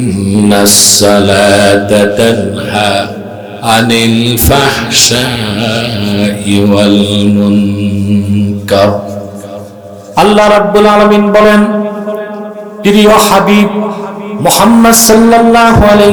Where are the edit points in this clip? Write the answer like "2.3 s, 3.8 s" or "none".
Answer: none